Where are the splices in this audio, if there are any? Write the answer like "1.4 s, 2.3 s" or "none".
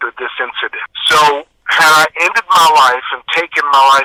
none